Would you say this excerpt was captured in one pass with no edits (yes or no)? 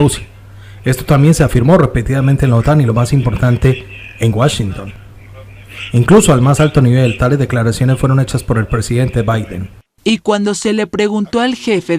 no